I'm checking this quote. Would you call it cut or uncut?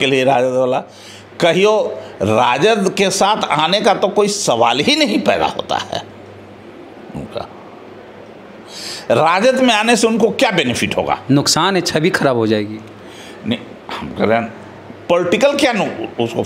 uncut